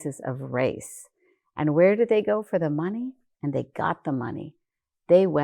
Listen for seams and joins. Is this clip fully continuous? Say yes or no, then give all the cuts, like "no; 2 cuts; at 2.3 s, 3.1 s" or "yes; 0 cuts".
yes; 0 cuts